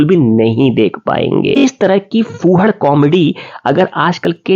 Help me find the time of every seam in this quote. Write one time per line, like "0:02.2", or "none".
0:01.6